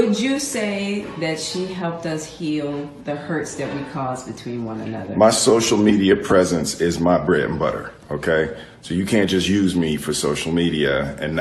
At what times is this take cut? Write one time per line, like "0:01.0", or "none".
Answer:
0:01.7